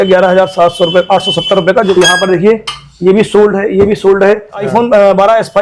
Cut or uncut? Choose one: cut